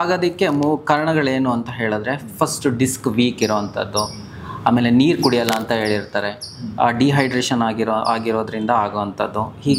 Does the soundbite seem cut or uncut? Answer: uncut